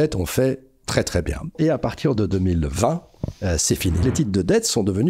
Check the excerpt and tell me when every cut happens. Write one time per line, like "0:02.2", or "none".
0:01.5
0:04.0

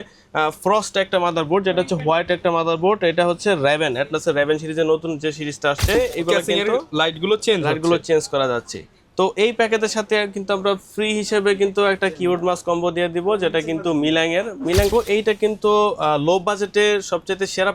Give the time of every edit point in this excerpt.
0:05.9
0:14.9

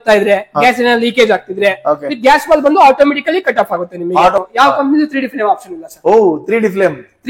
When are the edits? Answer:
0:04.5

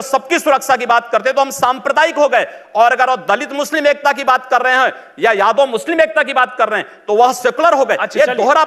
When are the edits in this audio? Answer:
none

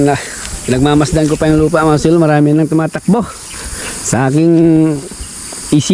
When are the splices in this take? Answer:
none

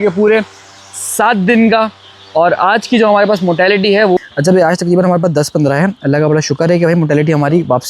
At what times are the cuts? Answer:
0:04.2

